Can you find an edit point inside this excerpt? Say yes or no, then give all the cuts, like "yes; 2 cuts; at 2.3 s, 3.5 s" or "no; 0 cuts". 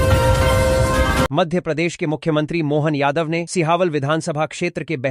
yes; 1 cut; at 1.3 s